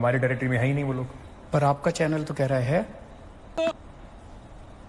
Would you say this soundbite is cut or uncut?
cut